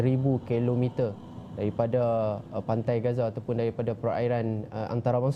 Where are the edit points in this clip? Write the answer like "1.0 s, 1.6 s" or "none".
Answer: none